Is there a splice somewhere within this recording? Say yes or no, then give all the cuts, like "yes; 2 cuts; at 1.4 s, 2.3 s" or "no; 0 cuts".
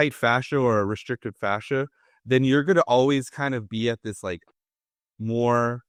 no; 0 cuts